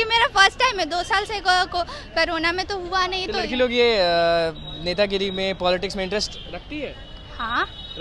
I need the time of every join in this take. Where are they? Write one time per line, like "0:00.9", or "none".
none